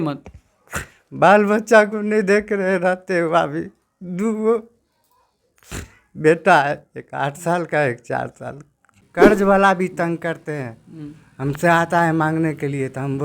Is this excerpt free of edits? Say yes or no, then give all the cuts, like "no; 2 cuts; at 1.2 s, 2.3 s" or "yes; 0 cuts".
no; 1 cut; at 9.1 s